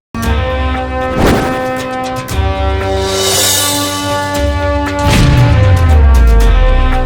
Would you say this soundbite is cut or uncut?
uncut